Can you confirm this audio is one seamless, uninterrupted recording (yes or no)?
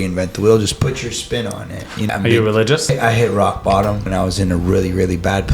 no